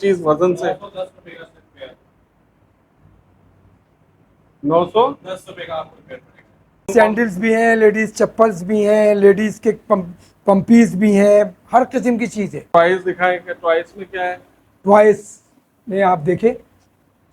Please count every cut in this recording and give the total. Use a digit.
2